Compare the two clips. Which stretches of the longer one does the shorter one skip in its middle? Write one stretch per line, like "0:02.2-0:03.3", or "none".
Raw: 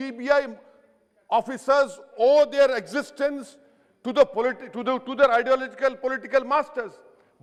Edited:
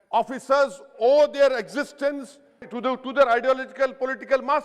0:03.8-0:04.7

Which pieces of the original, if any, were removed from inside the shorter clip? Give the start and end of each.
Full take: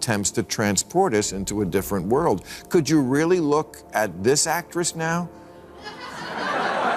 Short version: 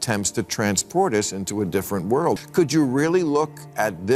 0:02.4-0:02.6

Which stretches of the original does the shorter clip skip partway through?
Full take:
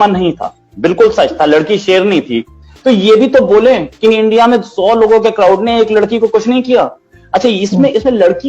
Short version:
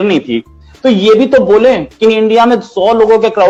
none

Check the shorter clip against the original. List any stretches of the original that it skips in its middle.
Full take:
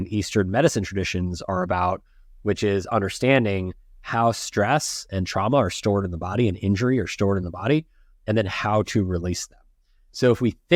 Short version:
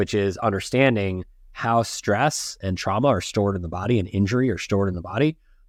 none

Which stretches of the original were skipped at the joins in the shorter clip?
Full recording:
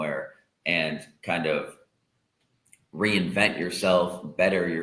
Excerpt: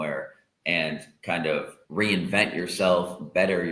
0:01.8-0:02.8

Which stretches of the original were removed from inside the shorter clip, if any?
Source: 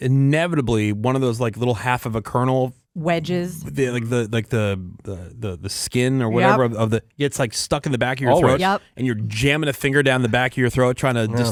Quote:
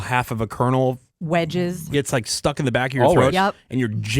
0:03.6-0:07.1

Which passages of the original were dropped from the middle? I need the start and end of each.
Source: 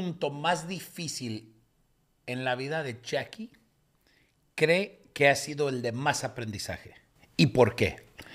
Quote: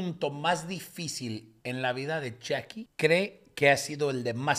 0:01.5-0:02.1
0:03.4-0:04.4

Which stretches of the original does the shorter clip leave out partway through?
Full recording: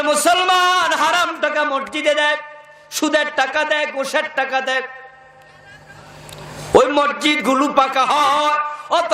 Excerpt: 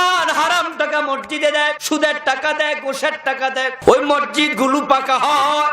0:02.4-0:02.9
0:04.9-0:06.6

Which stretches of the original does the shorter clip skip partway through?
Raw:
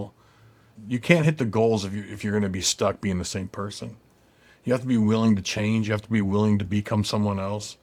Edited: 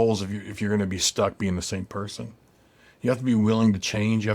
none

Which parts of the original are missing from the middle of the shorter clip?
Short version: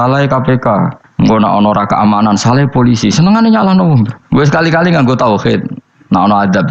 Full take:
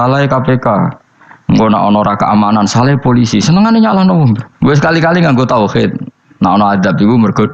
0:01.0-0:01.3

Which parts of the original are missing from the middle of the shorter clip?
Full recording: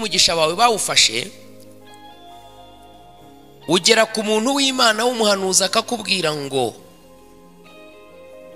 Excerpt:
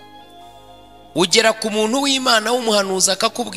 0:03.0-0:03.6

